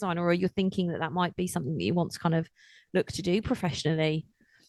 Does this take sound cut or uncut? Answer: uncut